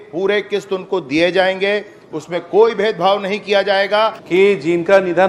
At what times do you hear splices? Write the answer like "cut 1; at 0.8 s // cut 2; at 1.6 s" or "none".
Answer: cut 1; at 4.2 s